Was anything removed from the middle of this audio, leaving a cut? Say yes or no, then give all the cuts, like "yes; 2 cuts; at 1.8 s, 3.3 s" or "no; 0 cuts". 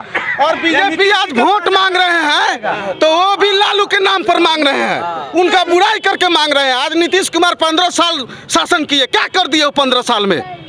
no; 0 cuts